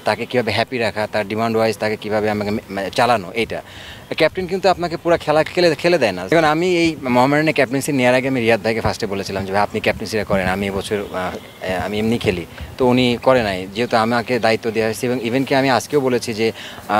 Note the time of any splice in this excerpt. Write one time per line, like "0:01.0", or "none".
0:06.2